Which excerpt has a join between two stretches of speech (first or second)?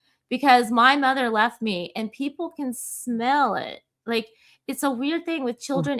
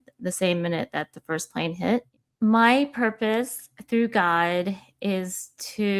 second